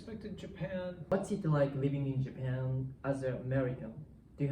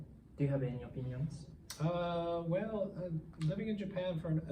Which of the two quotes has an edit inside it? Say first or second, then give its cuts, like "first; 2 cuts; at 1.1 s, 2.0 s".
first; 1 cut; at 1.1 s